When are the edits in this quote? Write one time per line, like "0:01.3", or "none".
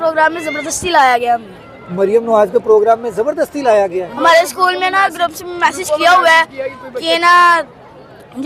none